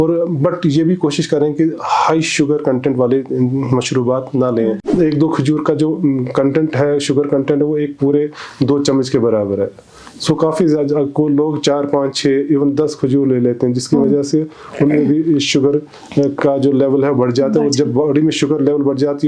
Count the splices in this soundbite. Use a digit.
1